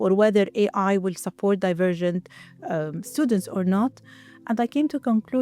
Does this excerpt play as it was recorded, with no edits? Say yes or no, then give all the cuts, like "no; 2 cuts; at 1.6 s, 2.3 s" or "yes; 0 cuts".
yes; 0 cuts